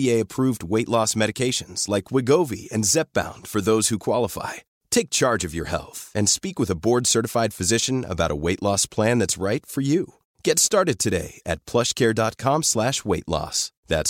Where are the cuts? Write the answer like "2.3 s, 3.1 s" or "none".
none